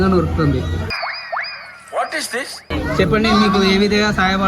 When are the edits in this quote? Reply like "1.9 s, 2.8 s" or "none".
2.7 s